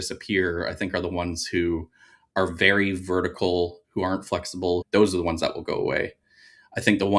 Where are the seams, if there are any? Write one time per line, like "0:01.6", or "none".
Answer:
0:04.8